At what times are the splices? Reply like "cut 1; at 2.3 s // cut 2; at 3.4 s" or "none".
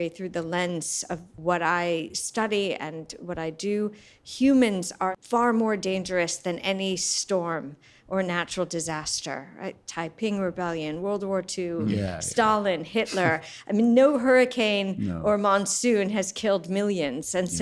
cut 1; at 1.3 s // cut 2; at 5.1 s